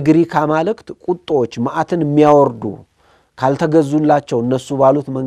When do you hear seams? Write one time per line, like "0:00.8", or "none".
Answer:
none